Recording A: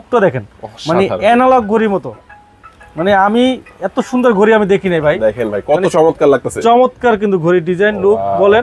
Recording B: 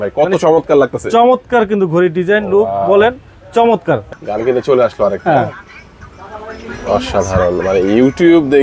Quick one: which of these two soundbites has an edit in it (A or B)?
B